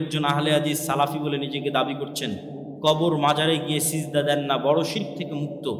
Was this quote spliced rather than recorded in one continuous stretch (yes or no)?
no